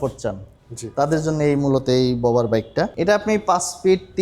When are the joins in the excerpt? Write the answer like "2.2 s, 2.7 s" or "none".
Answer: 2.9 s

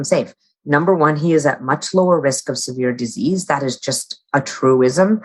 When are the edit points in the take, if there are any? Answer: none

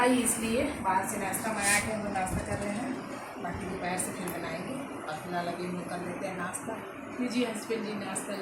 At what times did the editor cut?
none

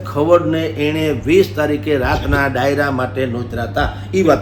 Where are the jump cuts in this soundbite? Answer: none

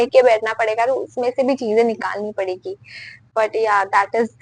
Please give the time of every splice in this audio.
none

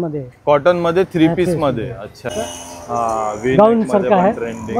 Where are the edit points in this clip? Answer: 2.3 s

